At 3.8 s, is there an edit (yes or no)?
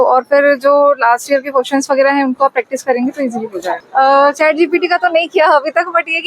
yes